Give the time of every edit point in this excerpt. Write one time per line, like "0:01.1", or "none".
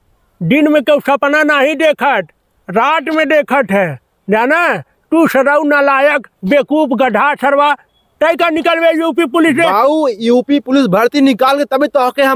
none

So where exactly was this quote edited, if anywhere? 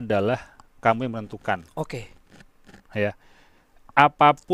none

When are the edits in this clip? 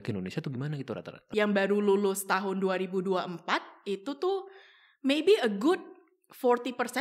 0:01.1

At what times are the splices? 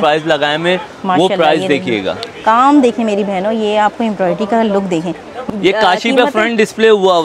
0:05.3

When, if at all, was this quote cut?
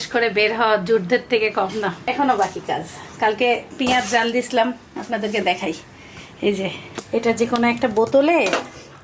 none

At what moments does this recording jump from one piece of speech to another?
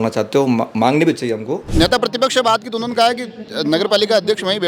0:01.6

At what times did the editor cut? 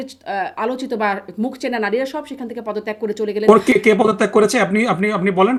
none

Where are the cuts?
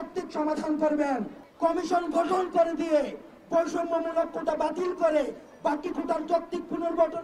0:01.4

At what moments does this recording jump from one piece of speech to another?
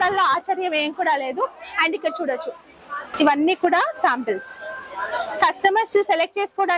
0:03.1

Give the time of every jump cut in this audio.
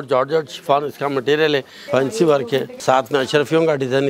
0:01.8
0:02.7

